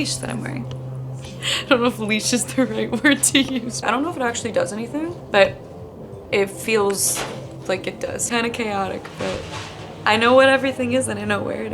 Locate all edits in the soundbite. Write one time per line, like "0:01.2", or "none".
0:01.2
0:03.8
0:05.2
0:08.3

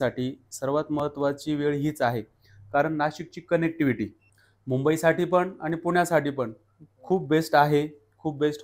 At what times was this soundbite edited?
none

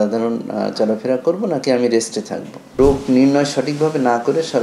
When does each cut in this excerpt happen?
0:02.8

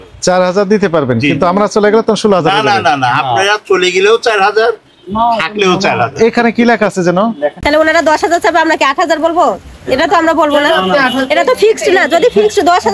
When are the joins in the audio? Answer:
0:07.6

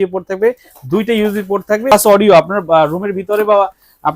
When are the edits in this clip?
0:01.9

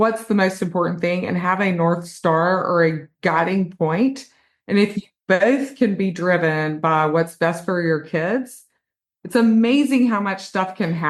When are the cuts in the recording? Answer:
none

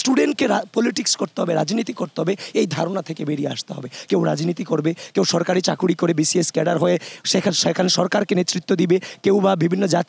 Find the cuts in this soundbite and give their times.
none

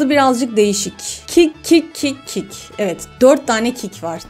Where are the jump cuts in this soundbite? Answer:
none

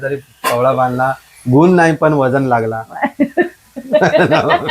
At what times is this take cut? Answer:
none

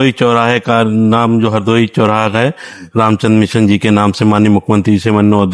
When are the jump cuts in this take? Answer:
none

